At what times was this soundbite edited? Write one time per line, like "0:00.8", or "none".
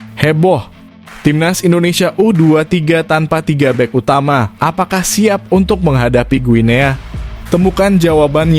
none